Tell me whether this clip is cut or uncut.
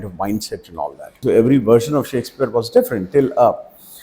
cut